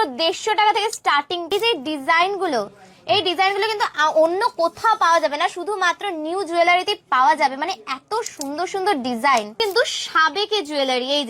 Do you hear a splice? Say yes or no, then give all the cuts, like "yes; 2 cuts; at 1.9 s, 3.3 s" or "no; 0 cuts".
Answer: yes; 2 cuts; at 1.5 s, 9.6 s